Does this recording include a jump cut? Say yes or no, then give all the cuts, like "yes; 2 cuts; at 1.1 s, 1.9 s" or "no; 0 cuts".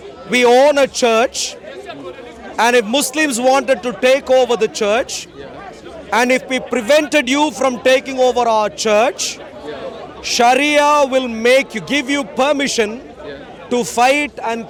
no; 0 cuts